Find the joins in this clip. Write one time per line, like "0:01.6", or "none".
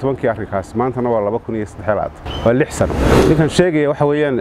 0:02.2
0:03.0